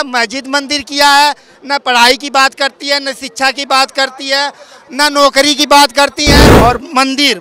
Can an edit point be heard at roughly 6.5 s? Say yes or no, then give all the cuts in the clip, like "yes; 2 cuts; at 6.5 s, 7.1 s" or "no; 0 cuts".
yes; 1 cut; at 6.5 s